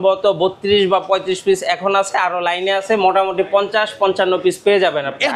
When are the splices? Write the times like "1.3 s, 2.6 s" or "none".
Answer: none